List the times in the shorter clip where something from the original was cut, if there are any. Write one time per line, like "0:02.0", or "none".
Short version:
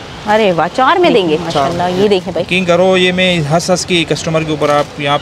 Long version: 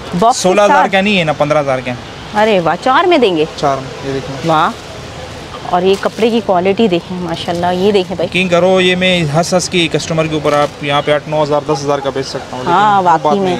0:01.7